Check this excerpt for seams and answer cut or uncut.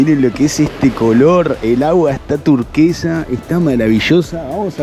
uncut